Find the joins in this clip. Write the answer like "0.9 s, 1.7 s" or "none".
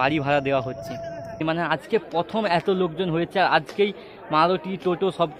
1.5 s